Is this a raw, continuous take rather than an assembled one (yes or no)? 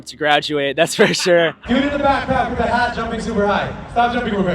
no